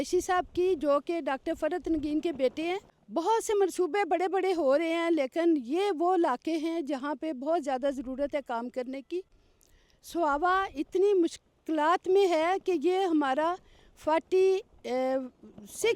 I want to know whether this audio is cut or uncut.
cut